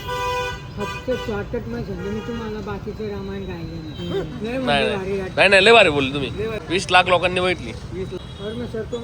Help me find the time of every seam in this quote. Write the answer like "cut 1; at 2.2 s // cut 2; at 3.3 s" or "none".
cut 1; at 6.6 s // cut 2; at 8.2 s